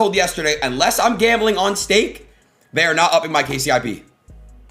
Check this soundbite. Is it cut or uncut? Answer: uncut